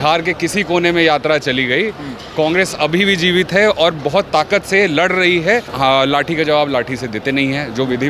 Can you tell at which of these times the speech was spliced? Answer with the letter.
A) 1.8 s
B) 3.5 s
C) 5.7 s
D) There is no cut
C